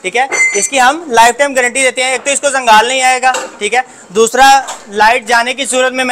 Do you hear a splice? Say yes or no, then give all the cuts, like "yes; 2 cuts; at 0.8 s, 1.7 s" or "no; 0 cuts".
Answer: no; 0 cuts